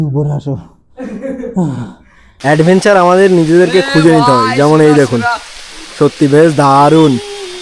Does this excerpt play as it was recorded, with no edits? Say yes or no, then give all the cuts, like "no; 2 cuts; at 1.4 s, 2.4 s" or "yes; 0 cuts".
no; 1 cut; at 2.4 s